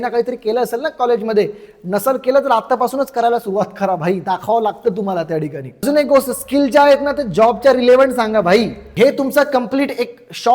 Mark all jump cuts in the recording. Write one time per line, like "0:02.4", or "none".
0:05.8
0:08.8